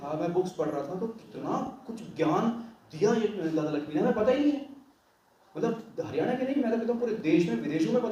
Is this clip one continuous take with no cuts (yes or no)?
yes